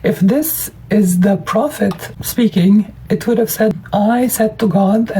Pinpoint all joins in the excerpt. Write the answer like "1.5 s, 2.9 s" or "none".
2.1 s, 3.8 s